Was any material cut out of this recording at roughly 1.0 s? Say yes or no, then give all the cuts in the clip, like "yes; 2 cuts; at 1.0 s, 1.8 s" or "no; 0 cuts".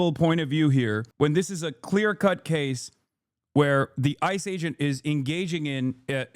yes; 1 cut; at 1.0 s